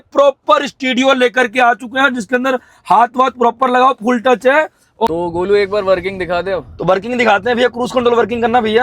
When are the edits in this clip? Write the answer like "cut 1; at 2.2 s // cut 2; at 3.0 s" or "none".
cut 1; at 5.1 s